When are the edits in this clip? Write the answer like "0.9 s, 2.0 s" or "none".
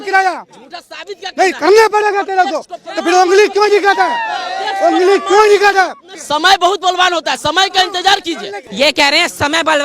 8.6 s